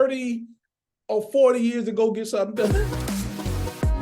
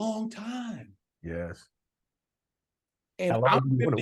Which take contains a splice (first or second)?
first